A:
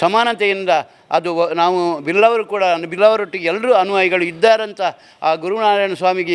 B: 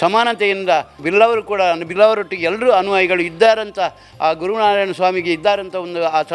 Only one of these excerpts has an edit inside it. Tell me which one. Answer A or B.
B